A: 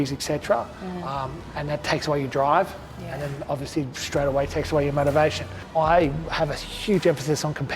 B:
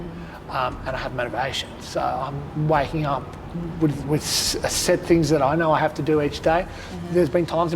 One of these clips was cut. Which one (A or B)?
A